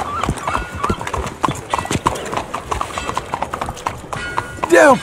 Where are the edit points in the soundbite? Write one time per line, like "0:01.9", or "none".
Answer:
none